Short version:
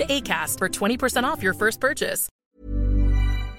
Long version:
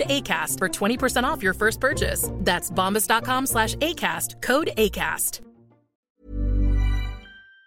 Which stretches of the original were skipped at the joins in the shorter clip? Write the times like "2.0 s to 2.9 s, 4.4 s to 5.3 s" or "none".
2.2 s to 5.9 s